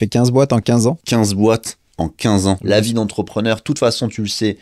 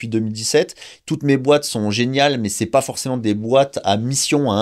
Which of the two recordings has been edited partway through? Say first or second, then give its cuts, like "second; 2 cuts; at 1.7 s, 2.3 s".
first; 2 cuts; at 1.0 s, 2.6 s